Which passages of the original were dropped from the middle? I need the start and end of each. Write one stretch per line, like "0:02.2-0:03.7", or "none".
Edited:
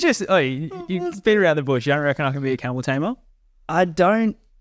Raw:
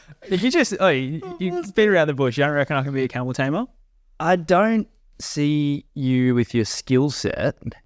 none